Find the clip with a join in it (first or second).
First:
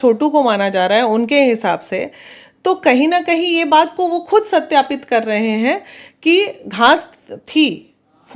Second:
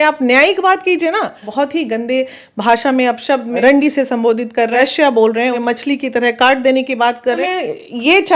second